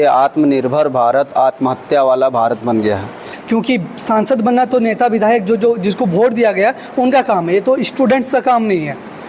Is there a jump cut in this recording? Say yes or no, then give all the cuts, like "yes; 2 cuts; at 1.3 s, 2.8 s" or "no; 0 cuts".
yes; 1 cut; at 3.3 s